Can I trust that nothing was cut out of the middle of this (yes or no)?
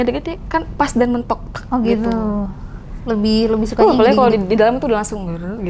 yes